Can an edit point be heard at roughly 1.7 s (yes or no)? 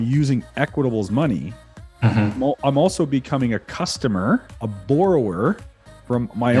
no